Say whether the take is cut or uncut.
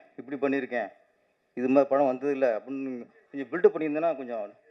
uncut